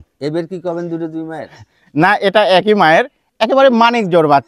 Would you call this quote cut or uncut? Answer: uncut